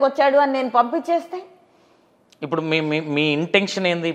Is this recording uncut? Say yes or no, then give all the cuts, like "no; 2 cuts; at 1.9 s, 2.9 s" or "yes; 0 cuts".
yes; 0 cuts